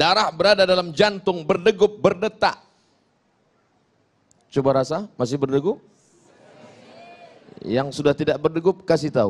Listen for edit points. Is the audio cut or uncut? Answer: uncut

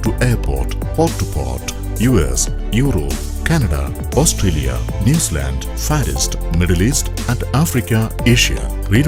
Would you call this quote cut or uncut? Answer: uncut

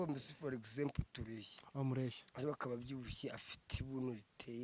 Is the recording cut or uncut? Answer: uncut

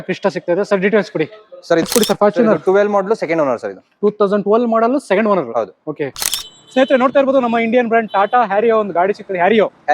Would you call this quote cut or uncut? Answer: cut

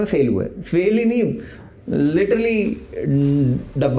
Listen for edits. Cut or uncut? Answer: uncut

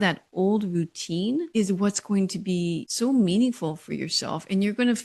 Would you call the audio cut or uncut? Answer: cut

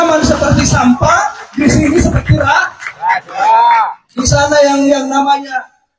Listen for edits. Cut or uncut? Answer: uncut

